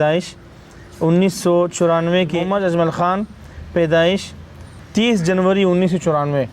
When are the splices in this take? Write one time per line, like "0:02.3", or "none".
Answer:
0:02.4
0:04.7